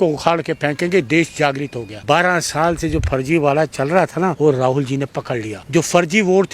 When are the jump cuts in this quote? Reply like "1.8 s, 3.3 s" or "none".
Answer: 1.9 s, 4.4 s, 5.5 s